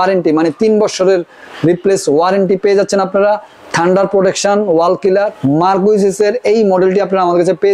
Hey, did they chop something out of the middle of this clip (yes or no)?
yes